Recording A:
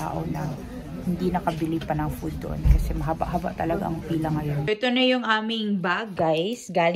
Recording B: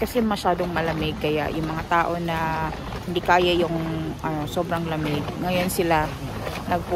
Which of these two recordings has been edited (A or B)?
A